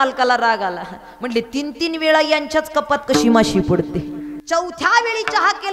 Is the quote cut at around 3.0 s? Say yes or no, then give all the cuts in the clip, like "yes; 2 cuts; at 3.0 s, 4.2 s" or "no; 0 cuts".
no; 1 cut; at 4.4 s